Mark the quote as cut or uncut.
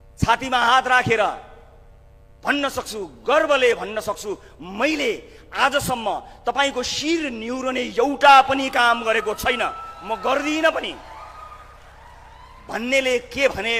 uncut